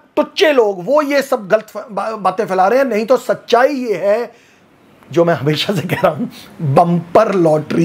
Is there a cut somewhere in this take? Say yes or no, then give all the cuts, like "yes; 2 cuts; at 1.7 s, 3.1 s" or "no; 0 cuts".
no; 0 cuts